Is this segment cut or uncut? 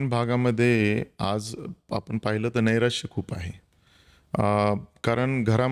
uncut